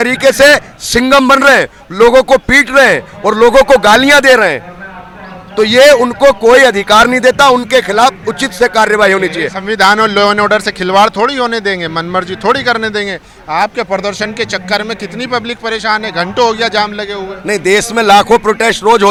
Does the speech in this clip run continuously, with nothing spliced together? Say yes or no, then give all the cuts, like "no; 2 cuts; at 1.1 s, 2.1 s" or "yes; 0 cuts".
yes; 0 cuts